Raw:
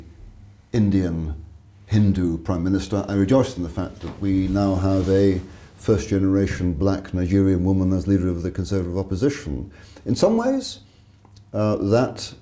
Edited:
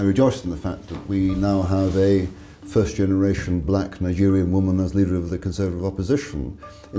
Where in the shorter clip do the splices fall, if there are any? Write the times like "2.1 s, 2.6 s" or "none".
none